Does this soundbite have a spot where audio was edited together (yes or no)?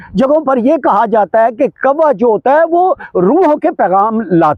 no